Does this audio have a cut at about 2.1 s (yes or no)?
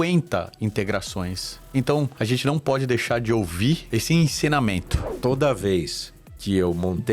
yes